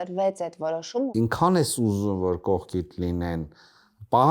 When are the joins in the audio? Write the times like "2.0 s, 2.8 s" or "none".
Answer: 1.1 s